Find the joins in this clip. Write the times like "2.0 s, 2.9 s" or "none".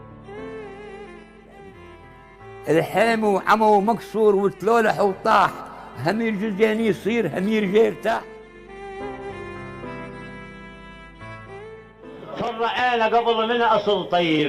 none